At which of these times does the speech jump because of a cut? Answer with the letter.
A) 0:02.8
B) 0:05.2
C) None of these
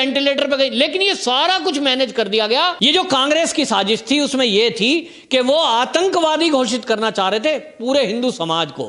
A